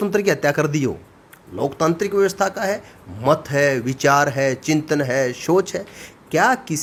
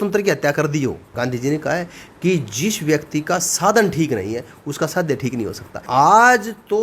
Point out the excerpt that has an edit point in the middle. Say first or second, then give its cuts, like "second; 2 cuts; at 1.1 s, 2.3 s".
second; 2 cuts; at 1.0 s, 5.7 s